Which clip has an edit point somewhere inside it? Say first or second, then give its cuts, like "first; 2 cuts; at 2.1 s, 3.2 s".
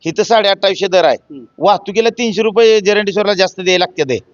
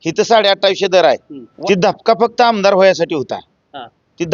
second; 1 cut; at 1.4 s